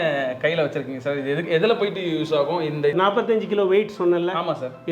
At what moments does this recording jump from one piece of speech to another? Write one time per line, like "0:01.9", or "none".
0:03.0